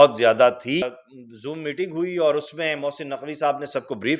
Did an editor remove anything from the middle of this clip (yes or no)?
yes